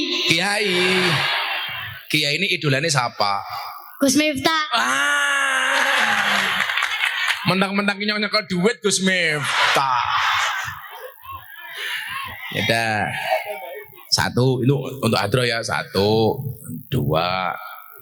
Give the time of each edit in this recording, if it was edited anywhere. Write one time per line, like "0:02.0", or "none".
none